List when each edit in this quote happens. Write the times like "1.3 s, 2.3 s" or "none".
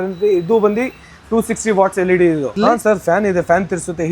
2.5 s